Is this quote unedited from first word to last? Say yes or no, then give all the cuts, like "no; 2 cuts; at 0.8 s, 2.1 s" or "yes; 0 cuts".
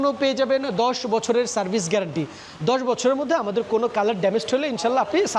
yes; 0 cuts